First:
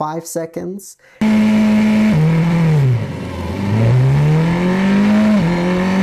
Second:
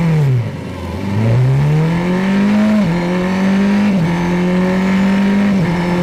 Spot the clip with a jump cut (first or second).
first